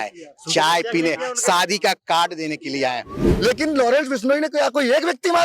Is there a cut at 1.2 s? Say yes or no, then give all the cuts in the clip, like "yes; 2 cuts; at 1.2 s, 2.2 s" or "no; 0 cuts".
no; 1 cut; at 3.2 s